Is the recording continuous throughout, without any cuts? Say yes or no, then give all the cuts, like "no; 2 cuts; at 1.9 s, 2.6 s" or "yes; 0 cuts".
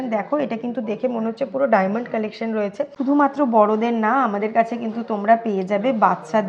no; 1 cut; at 2.9 s